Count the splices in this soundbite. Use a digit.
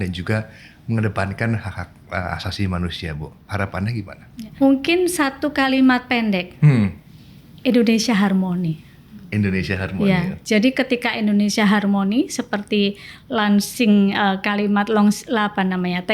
1